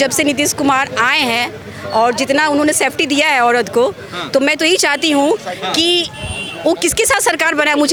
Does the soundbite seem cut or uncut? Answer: uncut